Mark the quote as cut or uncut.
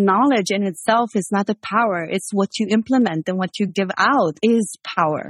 cut